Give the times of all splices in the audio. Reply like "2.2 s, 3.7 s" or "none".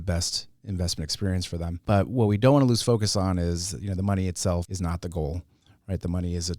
1.8 s, 4.7 s